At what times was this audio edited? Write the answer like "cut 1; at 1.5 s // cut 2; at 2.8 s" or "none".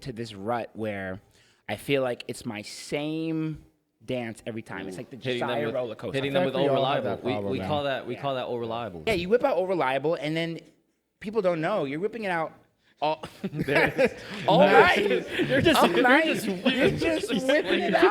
cut 1; at 9.1 s